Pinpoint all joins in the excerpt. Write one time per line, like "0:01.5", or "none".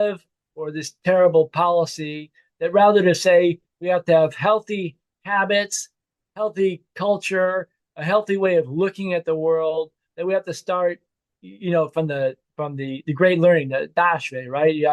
none